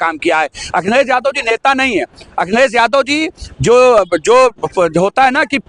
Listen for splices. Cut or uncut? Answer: uncut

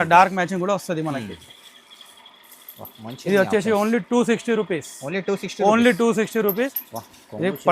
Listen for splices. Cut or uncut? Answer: cut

